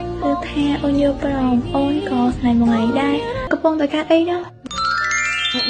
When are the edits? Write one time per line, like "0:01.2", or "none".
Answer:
0:03.5